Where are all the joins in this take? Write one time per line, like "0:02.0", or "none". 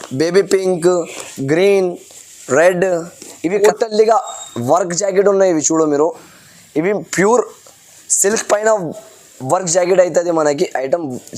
0:03.6